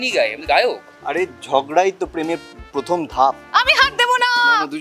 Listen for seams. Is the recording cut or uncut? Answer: cut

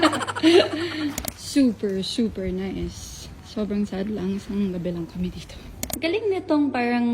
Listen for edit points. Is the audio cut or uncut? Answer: cut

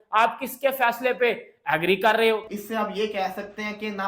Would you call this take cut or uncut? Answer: cut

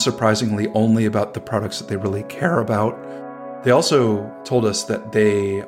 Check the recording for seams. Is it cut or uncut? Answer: cut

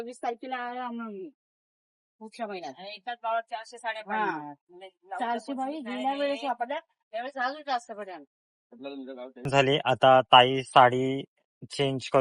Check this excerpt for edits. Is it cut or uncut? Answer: cut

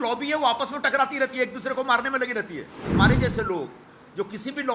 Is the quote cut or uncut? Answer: cut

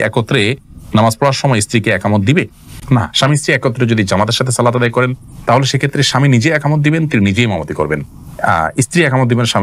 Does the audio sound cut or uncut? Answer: uncut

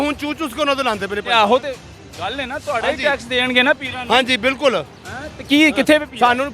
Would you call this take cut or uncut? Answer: uncut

